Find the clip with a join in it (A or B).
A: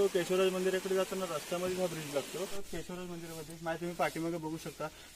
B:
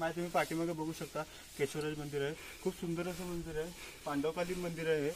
A